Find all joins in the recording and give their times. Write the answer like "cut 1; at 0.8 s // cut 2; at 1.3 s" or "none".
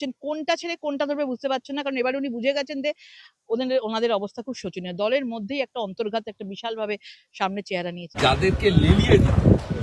cut 1; at 8.1 s